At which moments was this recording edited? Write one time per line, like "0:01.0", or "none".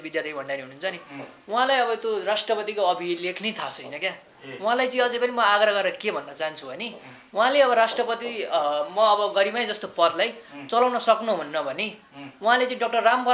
none